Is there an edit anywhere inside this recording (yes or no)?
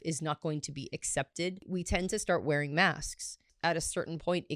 yes